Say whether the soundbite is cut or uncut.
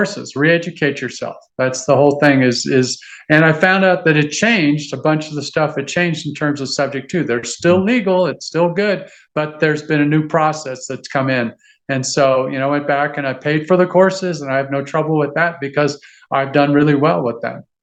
uncut